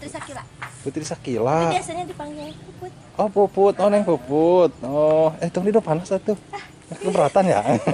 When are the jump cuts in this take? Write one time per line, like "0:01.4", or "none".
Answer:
none